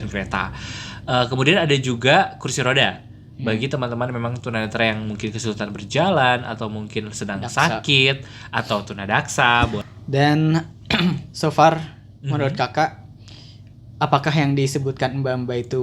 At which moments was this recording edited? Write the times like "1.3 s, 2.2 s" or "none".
9.9 s